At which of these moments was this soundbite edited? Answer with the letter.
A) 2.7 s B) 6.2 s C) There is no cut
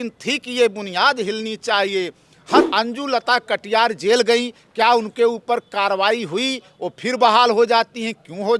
A